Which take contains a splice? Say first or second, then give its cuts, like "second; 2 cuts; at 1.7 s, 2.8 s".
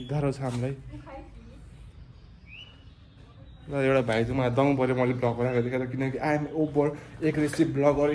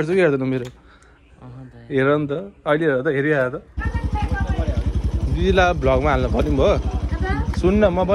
second; 1 cut; at 3.8 s